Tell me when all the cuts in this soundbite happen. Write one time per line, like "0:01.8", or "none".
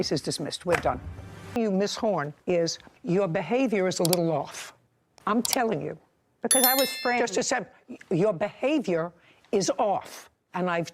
0:01.6